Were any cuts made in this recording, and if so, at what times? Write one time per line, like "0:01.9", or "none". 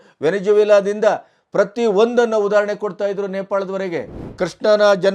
0:04.2